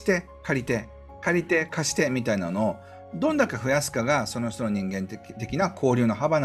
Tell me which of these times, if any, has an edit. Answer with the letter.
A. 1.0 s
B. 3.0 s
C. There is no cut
C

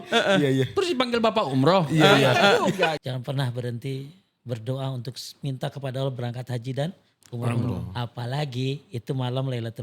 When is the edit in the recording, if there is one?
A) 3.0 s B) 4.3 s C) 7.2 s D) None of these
A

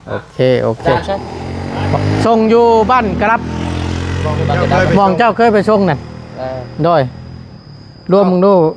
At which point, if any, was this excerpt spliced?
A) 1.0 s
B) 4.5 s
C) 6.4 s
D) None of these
A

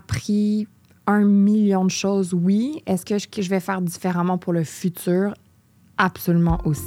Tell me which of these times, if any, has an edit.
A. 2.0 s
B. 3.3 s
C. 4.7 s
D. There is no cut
D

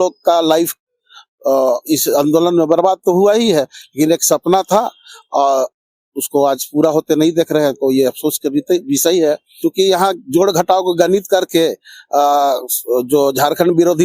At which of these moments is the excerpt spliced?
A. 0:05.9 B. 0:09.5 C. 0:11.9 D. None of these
B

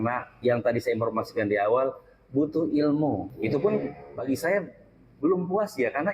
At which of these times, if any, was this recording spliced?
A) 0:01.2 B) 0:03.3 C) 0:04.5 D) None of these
B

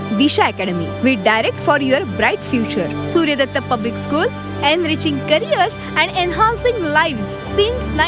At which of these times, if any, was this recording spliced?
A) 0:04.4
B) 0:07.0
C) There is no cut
C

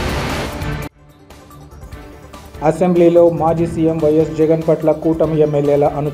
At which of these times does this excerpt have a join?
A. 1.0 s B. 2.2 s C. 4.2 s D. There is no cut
A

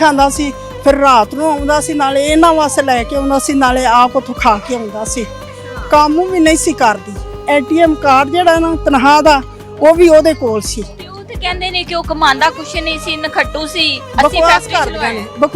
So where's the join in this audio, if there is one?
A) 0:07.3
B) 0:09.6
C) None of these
A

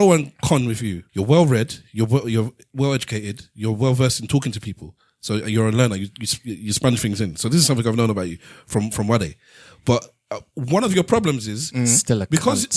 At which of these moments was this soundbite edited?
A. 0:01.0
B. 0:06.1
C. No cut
A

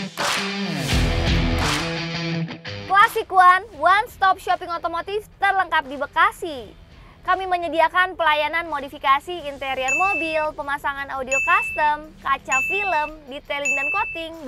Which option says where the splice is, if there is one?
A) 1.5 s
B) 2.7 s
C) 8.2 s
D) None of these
B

